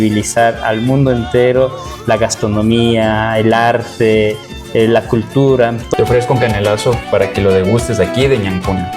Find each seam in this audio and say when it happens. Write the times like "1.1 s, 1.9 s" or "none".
5.9 s